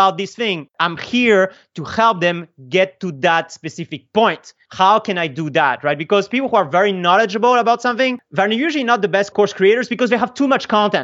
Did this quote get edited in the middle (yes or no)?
no